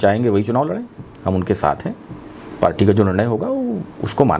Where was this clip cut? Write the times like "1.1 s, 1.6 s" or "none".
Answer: none